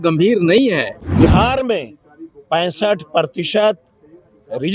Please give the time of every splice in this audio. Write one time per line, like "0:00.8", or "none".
0:01.0